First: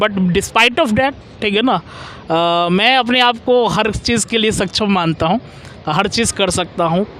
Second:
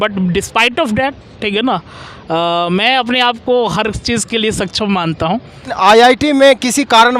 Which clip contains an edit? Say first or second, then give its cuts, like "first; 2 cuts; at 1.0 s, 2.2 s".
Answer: second; 1 cut; at 5.7 s